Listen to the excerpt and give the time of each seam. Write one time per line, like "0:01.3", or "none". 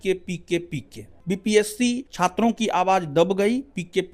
0:01.1
0:02.1